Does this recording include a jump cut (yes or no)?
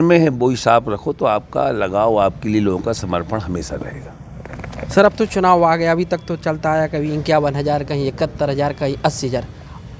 no